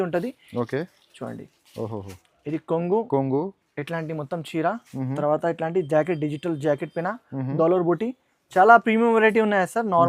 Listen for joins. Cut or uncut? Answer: uncut